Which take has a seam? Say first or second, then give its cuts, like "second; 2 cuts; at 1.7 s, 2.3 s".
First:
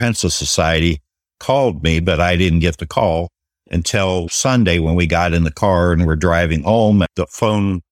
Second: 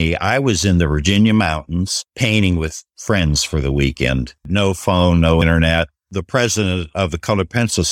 second; 4 cuts; at 2.0 s, 2.8 s, 4.5 s, 5.7 s